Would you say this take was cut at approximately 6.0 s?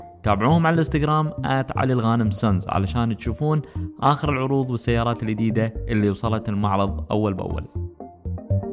no; 1 cut; at 7.7 s

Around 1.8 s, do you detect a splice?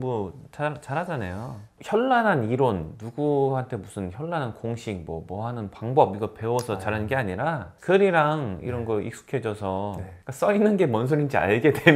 yes; 1 cut; at 1.8 s

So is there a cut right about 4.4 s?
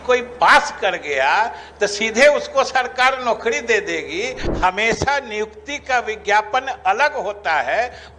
yes; 1 cut; at 4.4 s

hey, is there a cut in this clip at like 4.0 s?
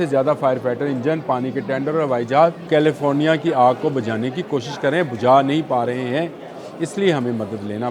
no; 1 cut; at 2.7 s

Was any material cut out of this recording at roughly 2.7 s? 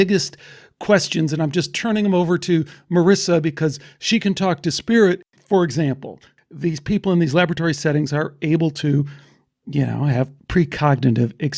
no; 3 cuts; at 5.2 s, 6.3 s, 10.4 s

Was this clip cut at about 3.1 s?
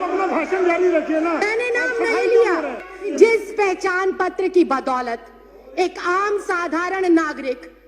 yes; 1 cut; at 3.1 s

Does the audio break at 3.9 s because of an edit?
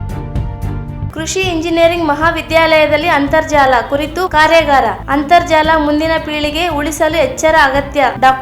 no; 1 cut; at 1.1 s

